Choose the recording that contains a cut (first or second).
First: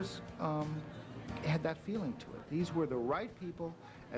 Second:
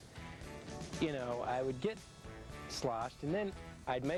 first